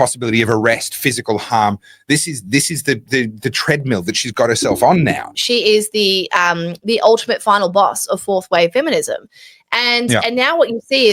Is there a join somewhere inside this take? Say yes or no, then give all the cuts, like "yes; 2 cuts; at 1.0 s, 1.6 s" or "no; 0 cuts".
yes; 1 cut; at 5.3 s